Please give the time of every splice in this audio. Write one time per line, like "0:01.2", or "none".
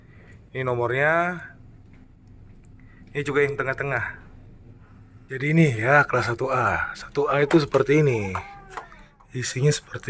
0:05.1